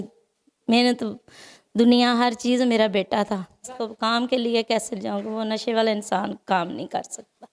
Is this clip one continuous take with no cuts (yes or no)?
no